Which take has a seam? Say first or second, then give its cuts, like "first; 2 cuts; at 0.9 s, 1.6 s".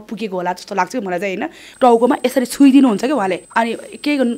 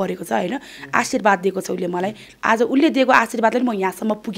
first; 2 cuts; at 1.6 s, 3.4 s